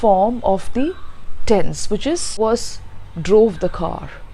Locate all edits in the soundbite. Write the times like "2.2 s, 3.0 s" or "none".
2.4 s